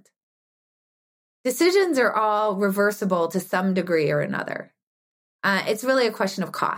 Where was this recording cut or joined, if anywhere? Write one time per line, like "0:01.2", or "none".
none